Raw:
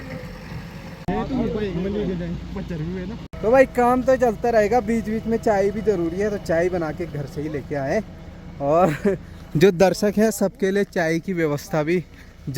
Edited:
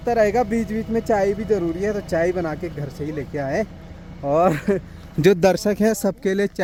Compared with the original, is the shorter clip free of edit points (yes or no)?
yes